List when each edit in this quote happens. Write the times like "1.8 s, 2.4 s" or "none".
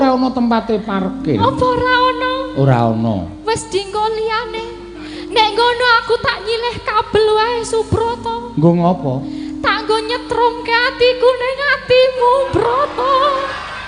none